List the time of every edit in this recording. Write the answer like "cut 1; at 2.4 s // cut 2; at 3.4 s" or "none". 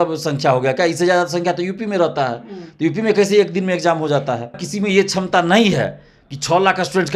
cut 1; at 4.6 s